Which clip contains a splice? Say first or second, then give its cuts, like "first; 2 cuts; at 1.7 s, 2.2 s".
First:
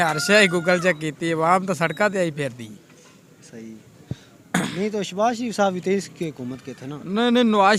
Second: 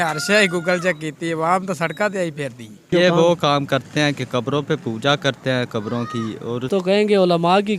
second; 2 cuts; at 2.9 s, 6.7 s